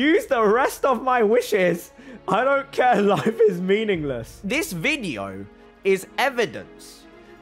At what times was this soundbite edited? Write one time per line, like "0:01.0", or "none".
0:04.3